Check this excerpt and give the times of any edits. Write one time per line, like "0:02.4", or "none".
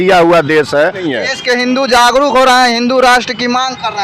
0:01.1